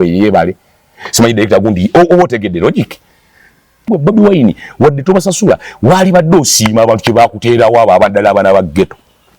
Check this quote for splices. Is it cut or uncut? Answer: cut